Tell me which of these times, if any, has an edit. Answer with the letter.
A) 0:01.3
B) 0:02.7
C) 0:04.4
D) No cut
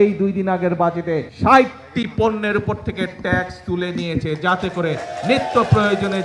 A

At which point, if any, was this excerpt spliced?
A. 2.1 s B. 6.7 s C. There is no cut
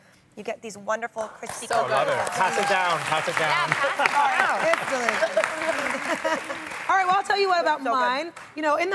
A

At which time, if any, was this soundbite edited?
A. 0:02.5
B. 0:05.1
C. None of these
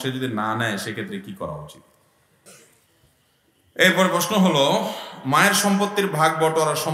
A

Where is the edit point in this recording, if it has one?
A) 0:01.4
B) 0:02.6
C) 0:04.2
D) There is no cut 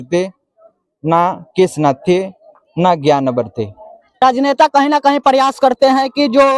C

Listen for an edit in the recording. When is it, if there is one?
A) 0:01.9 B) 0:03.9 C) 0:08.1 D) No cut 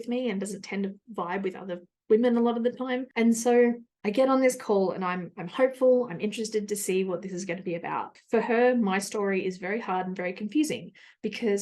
C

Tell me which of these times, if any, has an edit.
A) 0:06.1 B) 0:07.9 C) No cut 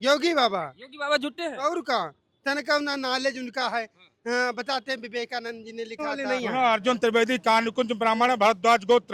A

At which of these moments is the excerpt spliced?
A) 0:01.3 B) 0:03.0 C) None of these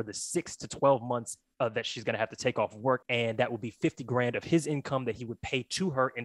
B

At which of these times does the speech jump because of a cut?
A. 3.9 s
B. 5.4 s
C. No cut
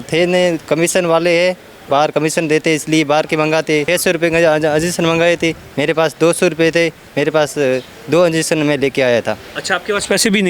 A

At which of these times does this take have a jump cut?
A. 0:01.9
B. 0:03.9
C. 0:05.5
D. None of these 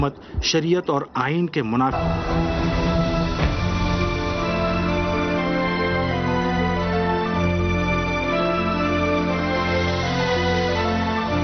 D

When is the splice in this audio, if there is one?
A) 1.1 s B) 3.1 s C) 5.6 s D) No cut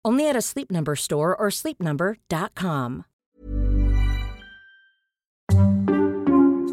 C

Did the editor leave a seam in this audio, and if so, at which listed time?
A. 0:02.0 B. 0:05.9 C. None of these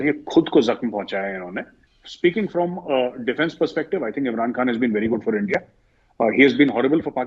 A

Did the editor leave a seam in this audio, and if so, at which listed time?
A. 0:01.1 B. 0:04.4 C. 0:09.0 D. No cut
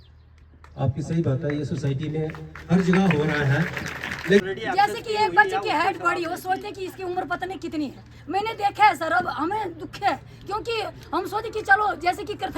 B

